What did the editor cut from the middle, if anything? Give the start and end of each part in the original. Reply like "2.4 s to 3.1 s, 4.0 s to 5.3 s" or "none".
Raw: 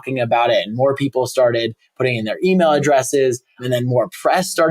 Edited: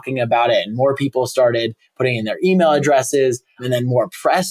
none